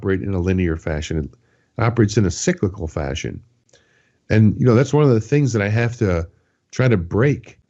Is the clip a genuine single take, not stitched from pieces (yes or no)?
yes